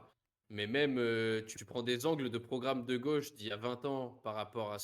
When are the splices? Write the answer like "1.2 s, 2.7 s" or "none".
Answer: 1.6 s